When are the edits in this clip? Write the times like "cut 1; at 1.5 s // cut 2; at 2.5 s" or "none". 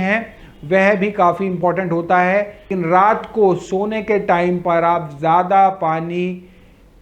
cut 1; at 2.7 s